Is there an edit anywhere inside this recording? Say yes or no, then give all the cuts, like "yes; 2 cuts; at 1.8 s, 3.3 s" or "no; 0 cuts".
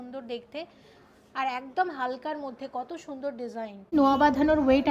yes; 1 cut; at 3.9 s